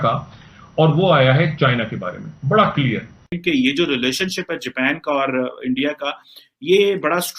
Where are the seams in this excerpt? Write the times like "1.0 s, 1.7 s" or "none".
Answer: 3.3 s